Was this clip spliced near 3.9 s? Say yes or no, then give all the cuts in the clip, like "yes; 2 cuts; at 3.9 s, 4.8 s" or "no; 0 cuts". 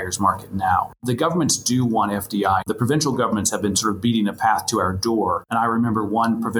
no; 3 cuts; at 1.0 s, 2.6 s, 5.4 s